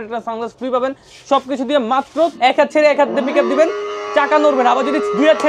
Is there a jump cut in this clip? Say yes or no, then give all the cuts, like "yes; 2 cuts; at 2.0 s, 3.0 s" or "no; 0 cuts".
yes; 1 cut; at 2.3 s